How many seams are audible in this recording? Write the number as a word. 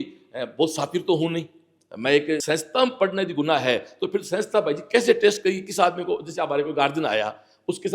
one